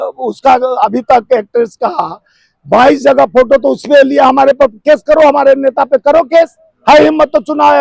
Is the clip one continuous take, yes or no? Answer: yes